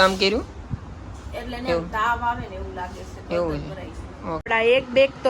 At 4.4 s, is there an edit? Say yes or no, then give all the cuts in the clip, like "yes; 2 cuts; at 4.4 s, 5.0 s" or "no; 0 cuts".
yes; 1 cut; at 4.4 s